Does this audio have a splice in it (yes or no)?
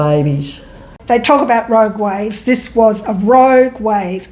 yes